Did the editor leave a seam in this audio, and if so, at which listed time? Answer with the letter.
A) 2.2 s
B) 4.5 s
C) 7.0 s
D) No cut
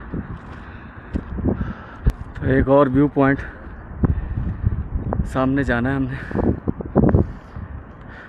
A